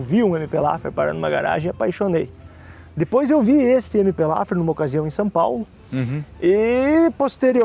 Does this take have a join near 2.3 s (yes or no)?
no